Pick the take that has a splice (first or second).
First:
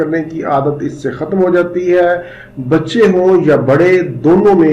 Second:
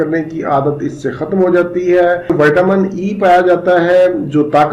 second